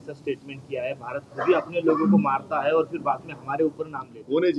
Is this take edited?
no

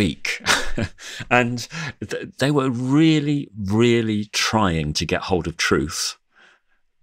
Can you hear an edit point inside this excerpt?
yes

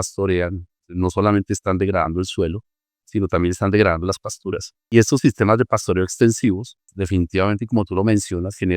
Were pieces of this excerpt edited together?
yes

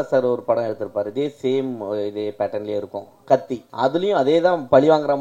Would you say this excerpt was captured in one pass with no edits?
no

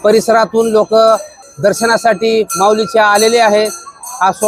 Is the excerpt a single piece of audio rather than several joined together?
yes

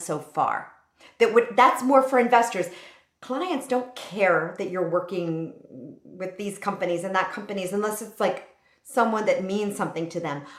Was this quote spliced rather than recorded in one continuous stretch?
no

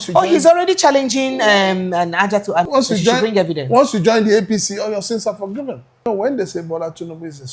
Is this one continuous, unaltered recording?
no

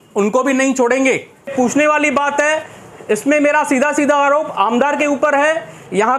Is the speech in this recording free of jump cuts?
no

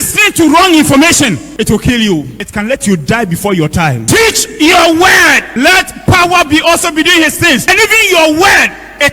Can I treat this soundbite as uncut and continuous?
no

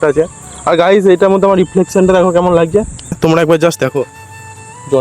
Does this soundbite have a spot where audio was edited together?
yes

